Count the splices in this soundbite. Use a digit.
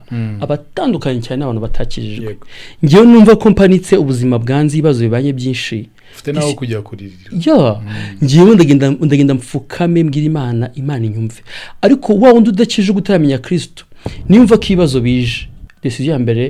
0